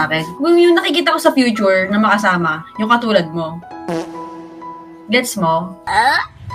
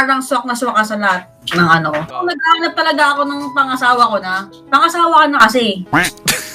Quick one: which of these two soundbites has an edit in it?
second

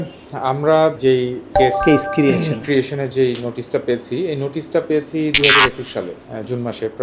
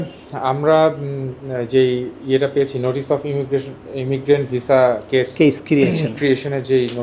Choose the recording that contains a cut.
first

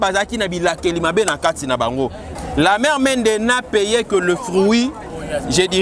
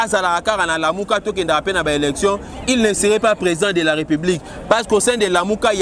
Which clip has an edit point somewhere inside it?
first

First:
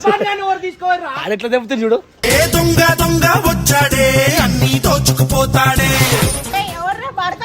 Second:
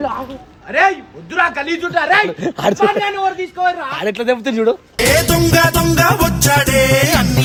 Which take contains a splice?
first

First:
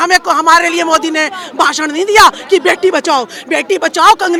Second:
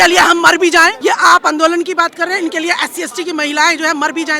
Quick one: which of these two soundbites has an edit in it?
second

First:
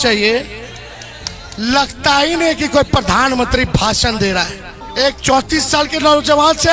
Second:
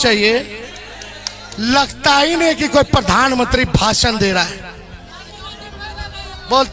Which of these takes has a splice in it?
first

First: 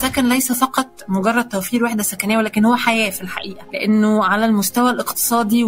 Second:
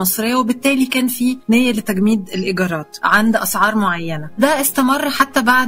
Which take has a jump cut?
second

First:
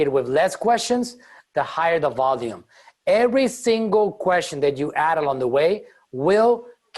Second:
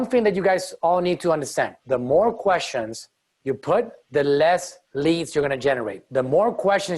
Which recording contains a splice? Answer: second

